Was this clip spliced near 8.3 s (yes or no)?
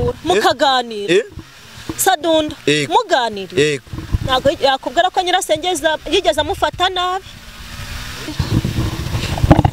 yes